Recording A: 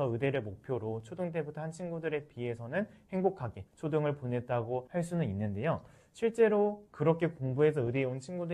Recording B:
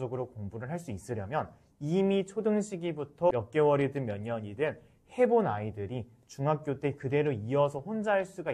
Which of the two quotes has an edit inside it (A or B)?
B